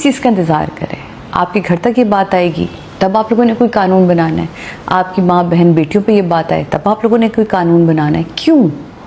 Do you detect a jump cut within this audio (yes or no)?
no